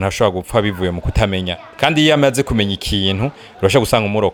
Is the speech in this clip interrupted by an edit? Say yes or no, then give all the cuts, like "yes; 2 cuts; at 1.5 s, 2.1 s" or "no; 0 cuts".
no; 0 cuts